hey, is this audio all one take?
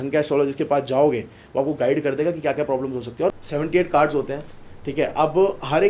no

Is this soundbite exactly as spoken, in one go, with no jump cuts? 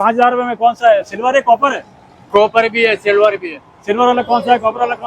yes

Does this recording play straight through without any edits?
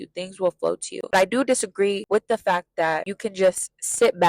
no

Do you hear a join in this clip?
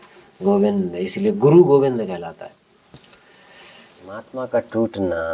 yes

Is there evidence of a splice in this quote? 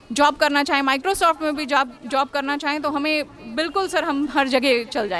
no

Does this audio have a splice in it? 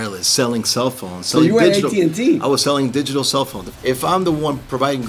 yes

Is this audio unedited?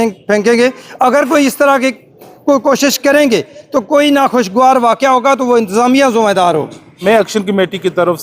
no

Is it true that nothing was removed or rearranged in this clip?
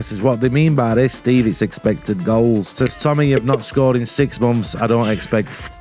no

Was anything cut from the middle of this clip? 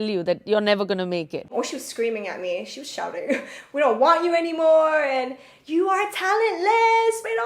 yes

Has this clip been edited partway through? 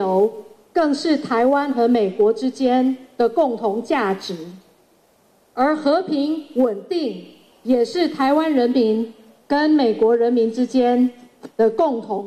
no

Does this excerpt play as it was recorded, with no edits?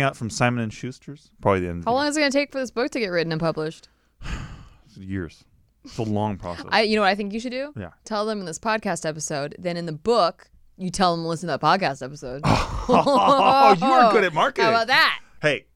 yes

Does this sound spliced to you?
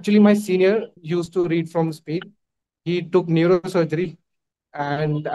yes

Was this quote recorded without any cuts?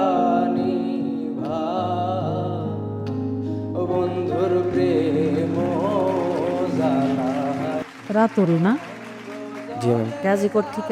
no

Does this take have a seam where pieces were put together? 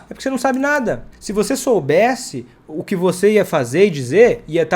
yes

